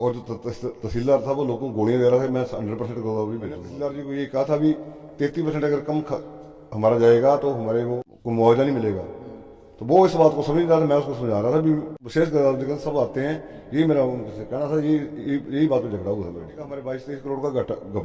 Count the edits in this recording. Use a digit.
4